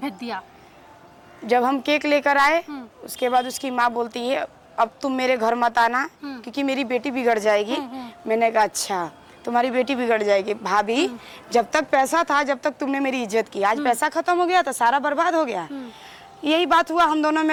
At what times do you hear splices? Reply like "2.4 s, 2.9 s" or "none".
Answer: none

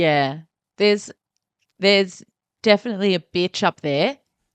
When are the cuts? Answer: none

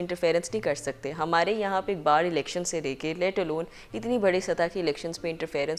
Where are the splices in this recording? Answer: none

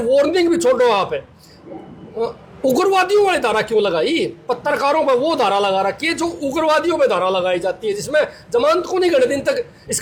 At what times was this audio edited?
none

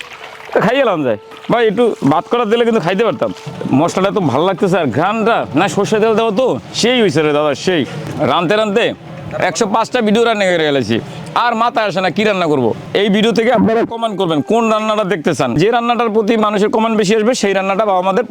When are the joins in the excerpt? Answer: 3.5 s, 6.7 s, 8.0 s, 12.8 s, 15.6 s

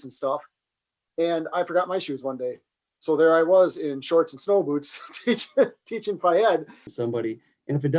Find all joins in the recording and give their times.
6.8 s

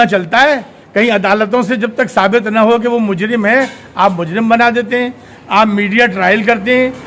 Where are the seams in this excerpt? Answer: none

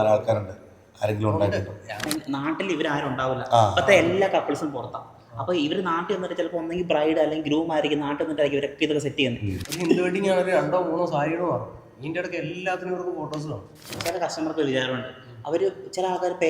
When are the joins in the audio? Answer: 2.0 s, 9.6 s, 14.0 s

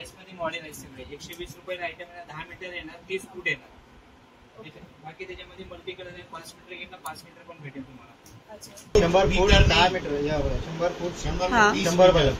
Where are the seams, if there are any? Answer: 9.0 s

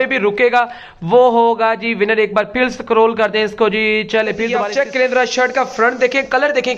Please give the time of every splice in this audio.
4.6 s

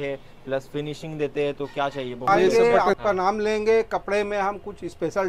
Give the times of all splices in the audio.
2.5 s

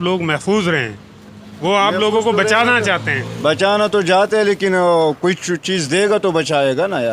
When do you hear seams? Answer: none

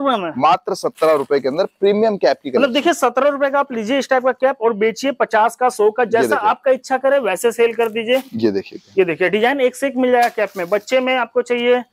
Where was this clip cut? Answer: none

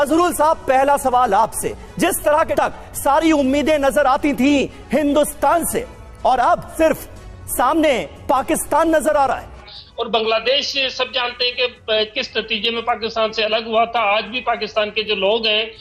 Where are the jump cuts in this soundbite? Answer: 2.5 s, 6.7 s, 9.8 s

